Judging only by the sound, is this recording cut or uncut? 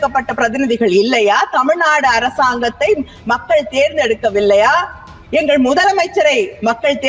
uncut